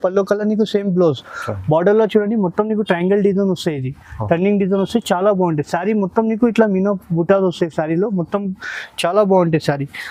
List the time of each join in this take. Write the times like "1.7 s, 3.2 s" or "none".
none